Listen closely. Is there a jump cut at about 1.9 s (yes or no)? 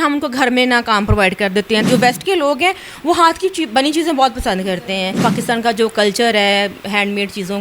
yes